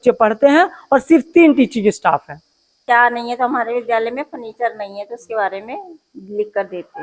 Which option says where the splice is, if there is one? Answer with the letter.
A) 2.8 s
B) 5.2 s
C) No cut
A